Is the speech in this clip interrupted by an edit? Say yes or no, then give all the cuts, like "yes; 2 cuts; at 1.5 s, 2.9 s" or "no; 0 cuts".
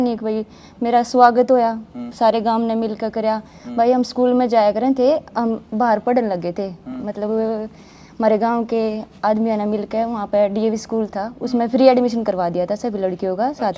no; 0 cuts